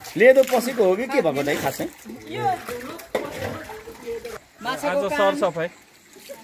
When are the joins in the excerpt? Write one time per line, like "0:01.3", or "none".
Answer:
0:04.3